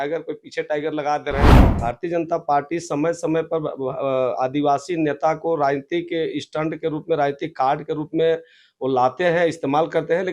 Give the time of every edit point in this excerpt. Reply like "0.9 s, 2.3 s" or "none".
1.6 s